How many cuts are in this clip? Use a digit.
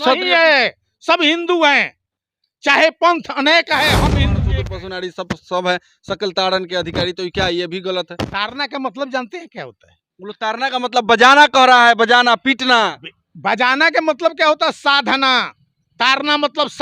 1